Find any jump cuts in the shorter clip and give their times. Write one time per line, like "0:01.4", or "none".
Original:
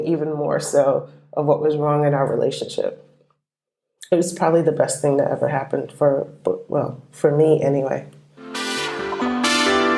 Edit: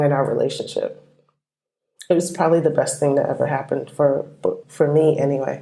0:04.6